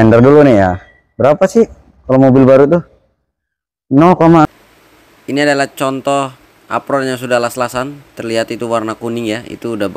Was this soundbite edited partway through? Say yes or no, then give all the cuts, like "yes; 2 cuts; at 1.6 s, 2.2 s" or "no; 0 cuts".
yes; 1 cut; at 4.5 s